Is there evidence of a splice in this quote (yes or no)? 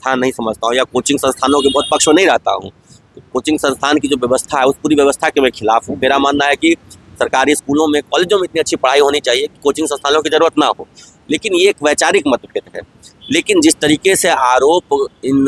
no